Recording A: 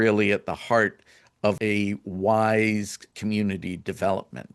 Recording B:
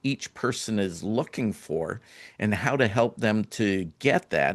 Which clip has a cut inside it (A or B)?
A